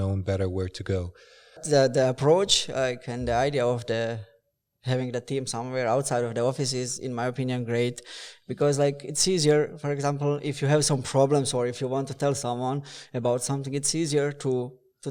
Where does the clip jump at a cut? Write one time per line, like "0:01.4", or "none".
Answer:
0:01.6